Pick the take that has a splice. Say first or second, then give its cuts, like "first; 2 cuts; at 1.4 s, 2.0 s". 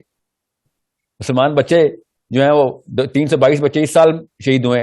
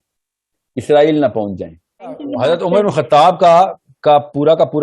second; 1 cut; at 2.3 s